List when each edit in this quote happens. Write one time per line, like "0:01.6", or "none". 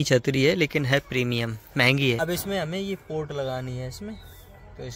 0:02.2

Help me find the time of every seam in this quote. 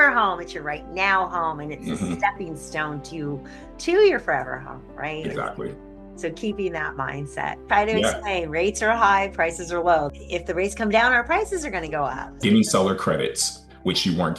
0:07.6
0:10.2
0:12.4

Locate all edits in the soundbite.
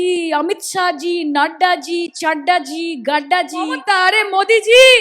0:03.8

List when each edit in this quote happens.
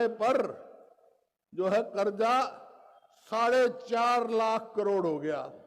none

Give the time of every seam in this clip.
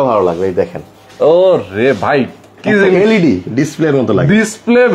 none

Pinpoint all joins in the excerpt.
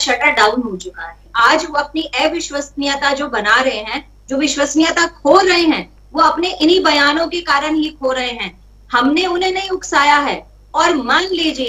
0:01.2

